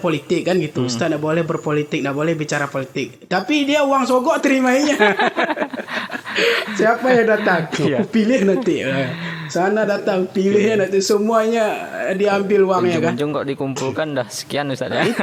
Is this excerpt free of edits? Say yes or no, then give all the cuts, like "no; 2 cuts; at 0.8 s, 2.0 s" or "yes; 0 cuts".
yes; 0 cuts